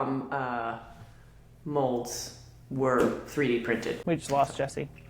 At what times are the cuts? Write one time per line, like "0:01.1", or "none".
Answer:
0:04.0